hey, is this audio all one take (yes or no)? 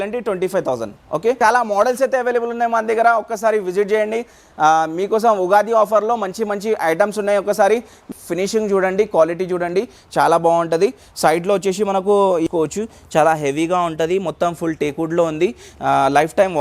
no